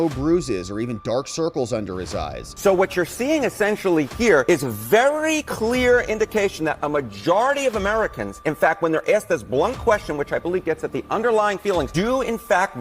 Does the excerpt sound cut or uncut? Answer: cut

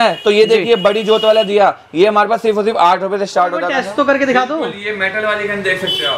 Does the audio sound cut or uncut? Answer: cut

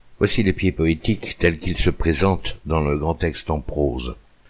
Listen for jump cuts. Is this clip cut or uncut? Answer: uncut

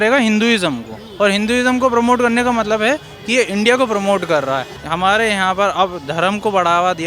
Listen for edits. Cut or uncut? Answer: cut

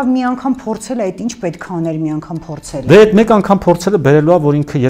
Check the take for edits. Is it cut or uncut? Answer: uncut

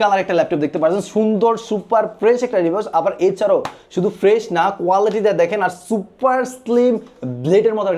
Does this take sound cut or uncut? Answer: uncut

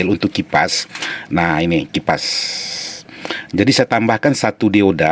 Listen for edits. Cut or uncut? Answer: uncut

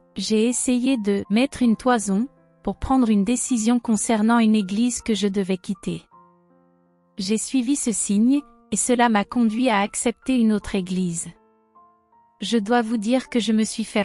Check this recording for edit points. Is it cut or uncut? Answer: cut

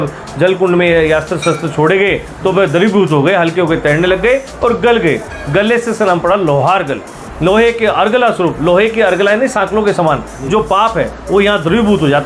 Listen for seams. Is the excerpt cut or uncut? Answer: uncut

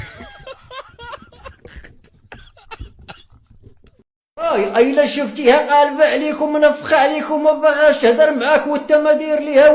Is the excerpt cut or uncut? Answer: cut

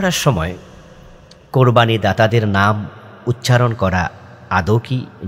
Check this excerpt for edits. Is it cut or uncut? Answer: uncut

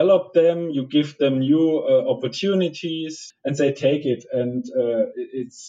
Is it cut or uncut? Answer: cut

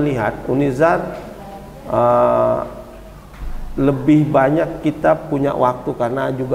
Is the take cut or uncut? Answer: uncut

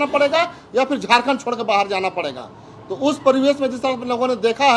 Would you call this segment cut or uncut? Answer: uncut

